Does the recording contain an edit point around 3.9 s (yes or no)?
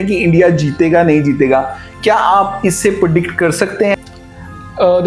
yes